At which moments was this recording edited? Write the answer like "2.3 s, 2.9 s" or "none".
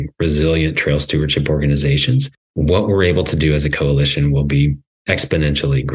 2.4 s, 4.9 s